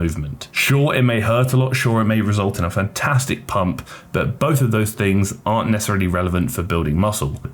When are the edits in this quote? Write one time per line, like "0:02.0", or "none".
none